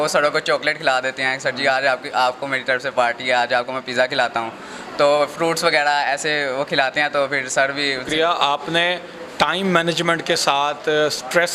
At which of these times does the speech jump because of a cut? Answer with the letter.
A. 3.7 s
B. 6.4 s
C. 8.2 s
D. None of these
C